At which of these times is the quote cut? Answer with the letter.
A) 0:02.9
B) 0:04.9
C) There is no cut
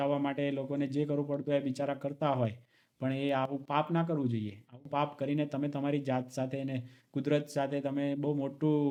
C